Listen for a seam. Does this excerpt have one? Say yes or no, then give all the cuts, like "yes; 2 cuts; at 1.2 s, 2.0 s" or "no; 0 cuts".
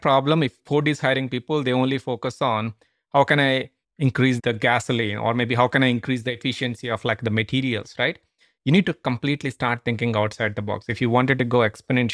yes; 1 cut; at 4.4 s